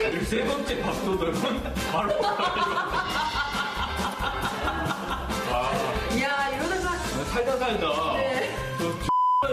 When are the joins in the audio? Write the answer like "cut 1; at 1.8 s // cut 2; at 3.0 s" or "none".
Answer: none